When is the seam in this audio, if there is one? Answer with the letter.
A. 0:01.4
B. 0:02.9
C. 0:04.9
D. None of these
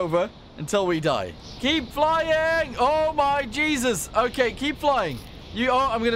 A